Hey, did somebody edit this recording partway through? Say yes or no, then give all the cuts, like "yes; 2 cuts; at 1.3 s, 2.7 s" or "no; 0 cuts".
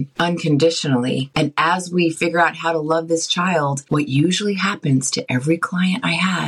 yes; 1 cut; at 1.3 s